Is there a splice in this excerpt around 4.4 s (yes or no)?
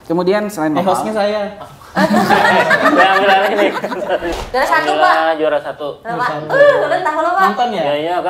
yes